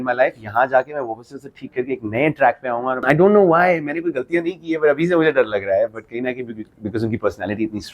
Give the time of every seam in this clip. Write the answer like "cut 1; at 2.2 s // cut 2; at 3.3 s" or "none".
cut 1; at 3.0 s